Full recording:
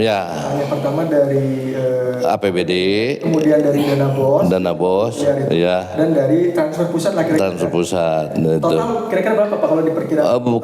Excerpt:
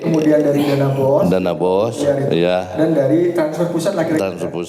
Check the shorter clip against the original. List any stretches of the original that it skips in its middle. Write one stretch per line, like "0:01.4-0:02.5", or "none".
none